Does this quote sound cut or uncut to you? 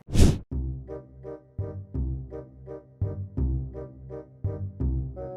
uncut